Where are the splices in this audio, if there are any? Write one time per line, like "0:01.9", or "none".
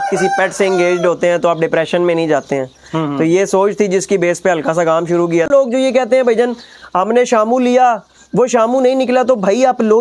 0:05.5